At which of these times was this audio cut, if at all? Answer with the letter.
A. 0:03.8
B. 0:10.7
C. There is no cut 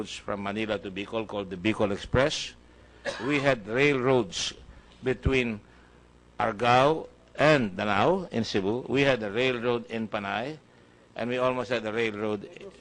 A